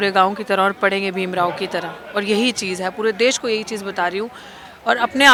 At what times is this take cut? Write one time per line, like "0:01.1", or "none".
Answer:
none